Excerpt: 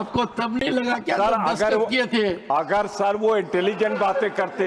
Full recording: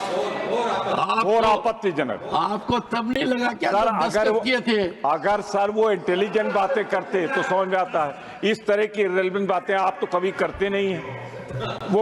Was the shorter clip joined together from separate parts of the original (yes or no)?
no